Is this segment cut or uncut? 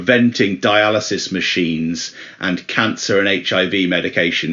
uncut